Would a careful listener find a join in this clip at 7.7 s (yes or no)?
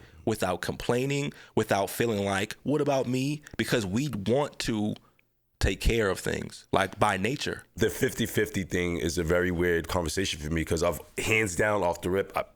yes